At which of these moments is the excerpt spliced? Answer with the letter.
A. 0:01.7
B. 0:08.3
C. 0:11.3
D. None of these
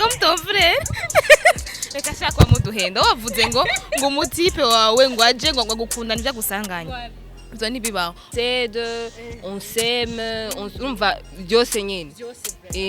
B